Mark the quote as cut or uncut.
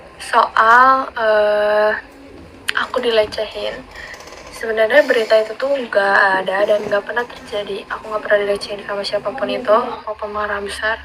cut